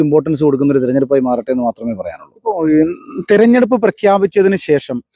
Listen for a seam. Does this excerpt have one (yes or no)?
no